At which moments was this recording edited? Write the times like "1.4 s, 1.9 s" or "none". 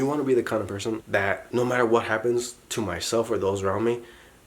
1.1 s

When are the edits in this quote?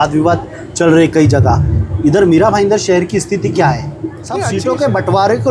4.3 s

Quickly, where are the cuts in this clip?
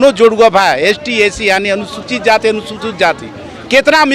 none

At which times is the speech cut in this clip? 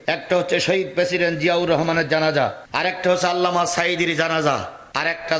none

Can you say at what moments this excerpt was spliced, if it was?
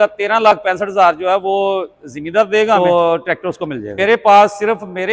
2.8 s, 3.8 s

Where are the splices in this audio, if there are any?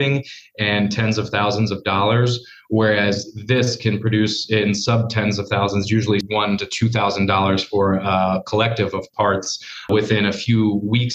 6.2 s, 9.9 s

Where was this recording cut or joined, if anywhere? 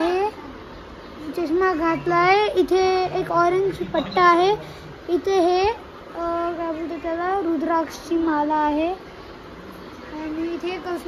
none

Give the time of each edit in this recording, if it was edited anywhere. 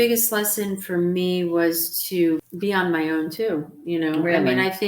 2.5 s

